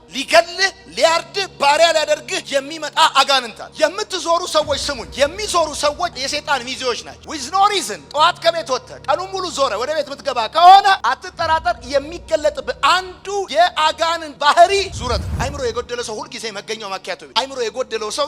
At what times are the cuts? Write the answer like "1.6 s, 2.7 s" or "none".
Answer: 3.6 s, 15.3 s